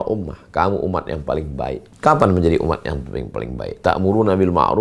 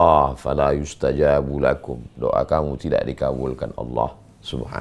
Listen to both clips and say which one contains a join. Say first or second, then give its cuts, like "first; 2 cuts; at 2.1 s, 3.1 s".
first; 1 cut; at 1.9 s